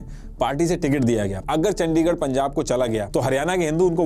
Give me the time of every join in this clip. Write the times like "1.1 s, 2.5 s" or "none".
1.4 s